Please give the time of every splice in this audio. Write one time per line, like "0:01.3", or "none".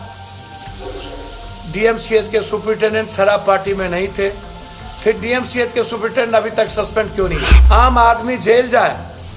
0:07.5